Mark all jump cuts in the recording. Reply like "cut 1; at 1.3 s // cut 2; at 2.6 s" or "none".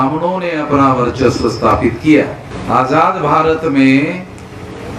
cut 1; at 2.5 s